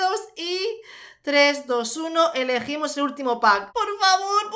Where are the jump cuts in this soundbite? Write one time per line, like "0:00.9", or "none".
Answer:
0:03.7